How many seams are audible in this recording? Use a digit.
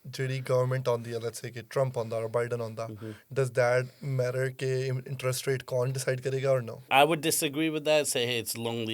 1